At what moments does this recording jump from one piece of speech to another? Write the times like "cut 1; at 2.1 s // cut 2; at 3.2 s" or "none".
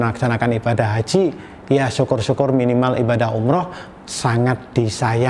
none